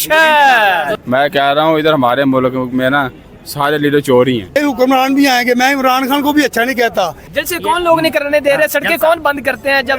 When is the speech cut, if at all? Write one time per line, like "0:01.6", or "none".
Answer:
0:00.9
0:04.6
0:07.2